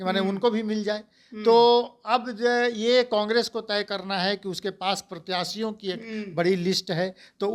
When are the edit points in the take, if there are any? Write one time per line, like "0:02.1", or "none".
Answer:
none